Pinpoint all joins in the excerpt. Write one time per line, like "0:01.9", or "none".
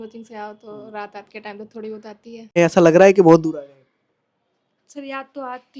0:02.5